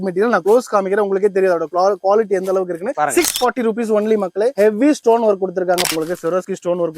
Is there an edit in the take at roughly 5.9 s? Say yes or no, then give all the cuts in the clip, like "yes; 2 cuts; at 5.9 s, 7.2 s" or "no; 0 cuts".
yes; 1 cut; at 5.9 s